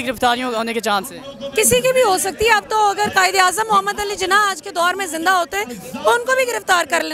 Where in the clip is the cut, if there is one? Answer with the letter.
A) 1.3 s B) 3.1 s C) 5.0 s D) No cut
D